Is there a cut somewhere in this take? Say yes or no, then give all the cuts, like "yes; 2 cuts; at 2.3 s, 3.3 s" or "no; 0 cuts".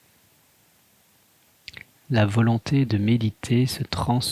yes; 2 cuts; at 1.6 s, 2.9 s